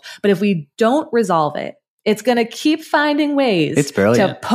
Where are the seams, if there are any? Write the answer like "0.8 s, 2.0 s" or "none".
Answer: none